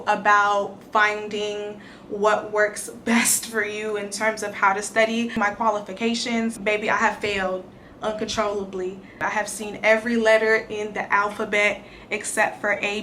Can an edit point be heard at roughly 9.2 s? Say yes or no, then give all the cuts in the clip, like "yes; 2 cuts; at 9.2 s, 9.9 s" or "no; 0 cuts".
yes; 3 cuts; at 5.4 s, 6.6 s, 9.2 s